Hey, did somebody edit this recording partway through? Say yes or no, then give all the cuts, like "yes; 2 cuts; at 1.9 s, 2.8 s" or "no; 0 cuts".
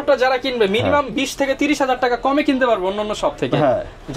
no; 0 cuts